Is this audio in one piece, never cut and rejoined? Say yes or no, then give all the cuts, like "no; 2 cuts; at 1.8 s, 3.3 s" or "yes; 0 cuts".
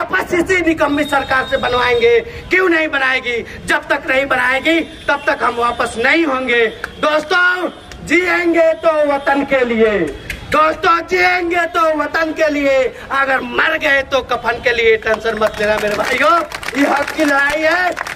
yes; 0 cuts